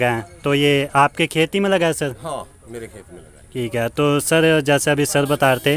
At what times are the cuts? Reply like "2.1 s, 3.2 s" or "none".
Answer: none